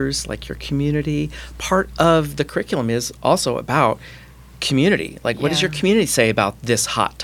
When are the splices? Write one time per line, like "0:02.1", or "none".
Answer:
none